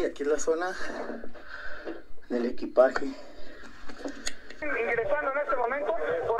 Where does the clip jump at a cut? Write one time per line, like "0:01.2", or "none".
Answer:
0:04.6